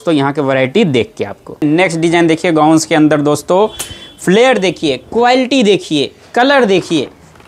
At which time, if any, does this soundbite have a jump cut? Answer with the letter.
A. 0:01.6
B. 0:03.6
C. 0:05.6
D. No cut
A